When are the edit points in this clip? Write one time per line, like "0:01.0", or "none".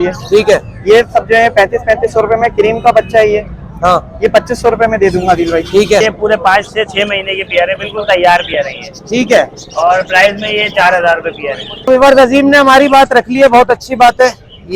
0:06.0
0:11.7